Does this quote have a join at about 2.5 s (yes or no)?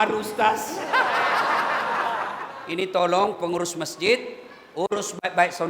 yes